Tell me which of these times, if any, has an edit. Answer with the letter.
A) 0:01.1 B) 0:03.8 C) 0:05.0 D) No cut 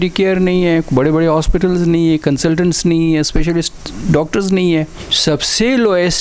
C